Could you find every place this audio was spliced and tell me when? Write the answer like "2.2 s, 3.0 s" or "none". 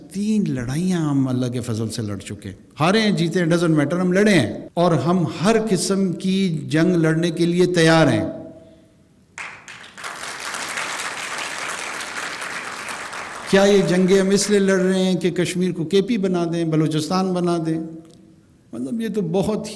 4.6 s